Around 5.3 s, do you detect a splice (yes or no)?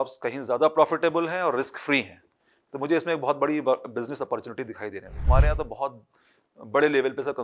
yes